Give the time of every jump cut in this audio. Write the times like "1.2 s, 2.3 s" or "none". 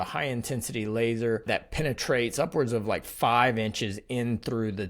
1.5 s